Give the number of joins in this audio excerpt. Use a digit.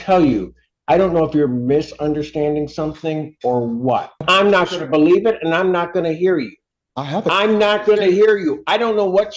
1